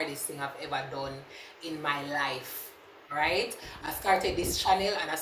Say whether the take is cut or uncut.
uncut